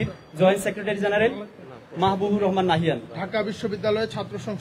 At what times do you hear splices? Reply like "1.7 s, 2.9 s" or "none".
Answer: 3.1 s